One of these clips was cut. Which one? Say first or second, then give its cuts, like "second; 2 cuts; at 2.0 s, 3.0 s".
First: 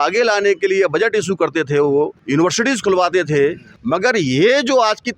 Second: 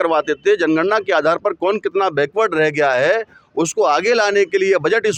first; 2 cuts; at 2.2 s, 3.7 s